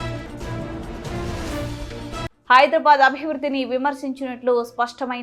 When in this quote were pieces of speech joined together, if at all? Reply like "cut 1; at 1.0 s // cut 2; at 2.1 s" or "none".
none